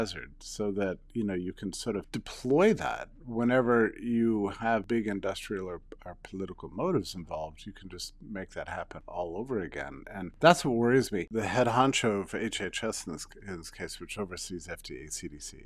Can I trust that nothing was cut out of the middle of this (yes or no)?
no